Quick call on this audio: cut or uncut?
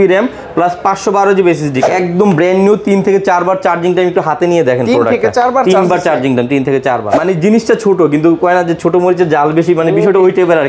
cut